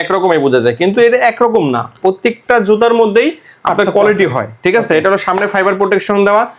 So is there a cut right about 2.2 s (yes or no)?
no